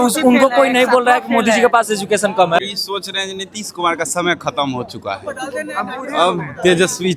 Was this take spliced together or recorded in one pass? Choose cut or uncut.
cut